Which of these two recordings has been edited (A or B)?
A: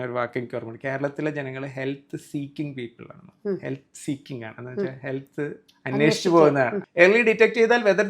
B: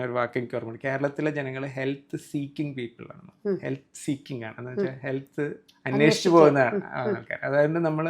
A